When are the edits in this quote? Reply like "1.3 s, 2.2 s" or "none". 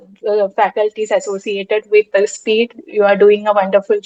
none